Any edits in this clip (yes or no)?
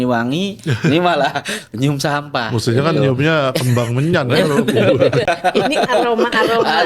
no